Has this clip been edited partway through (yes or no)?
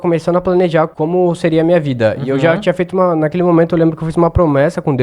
yes